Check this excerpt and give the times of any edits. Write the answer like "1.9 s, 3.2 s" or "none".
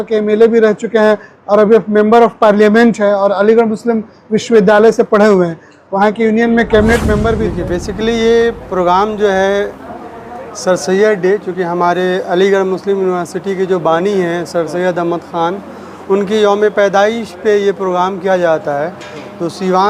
7.5 s

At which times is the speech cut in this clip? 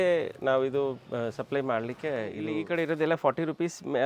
2.6 s

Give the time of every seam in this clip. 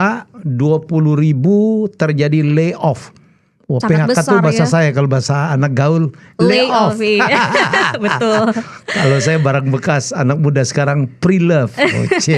none

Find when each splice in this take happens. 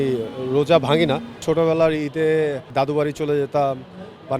1.4 s, 2.7 s

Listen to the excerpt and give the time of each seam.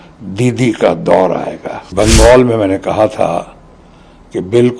1.8 s

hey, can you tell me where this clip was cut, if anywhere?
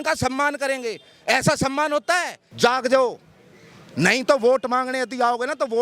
2.4 s

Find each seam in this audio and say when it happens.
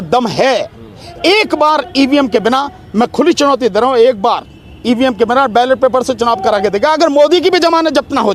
none

